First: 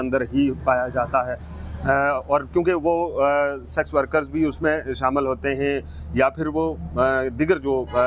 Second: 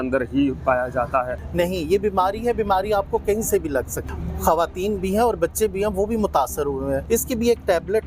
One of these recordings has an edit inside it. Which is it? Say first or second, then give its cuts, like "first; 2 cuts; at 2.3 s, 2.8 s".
second; 3 cuts; at 1.4 s, 4.0 s, 7.0 s